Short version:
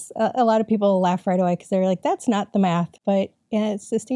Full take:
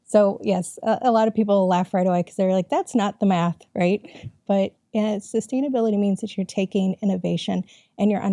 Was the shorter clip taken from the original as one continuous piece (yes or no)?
no